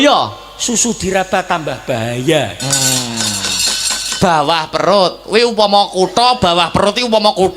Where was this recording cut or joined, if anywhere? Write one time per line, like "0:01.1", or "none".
0:04.2